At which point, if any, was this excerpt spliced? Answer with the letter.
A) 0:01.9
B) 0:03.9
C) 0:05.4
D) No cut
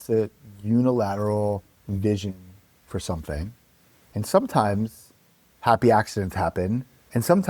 D